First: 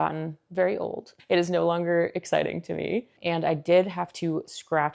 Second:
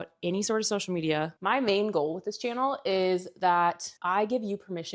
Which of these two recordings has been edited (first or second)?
second